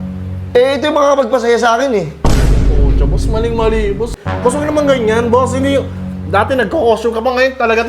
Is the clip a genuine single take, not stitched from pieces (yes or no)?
no